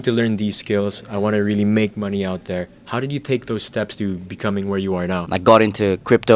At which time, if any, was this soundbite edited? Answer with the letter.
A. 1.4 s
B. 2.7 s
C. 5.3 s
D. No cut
C